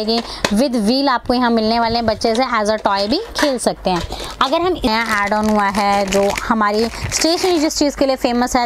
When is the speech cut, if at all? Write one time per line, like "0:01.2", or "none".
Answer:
0:04.9